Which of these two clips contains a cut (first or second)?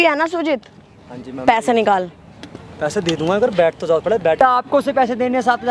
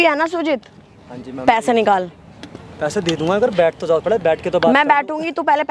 first